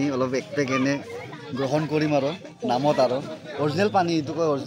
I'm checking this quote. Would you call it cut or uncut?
uncut